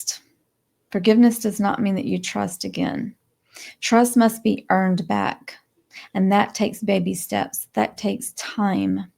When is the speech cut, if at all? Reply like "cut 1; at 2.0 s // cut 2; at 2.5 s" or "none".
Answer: none